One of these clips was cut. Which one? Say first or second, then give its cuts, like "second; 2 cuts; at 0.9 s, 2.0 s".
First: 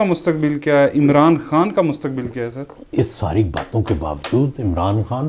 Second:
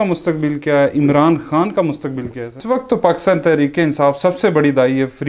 second; 1 cut; at 2.6 s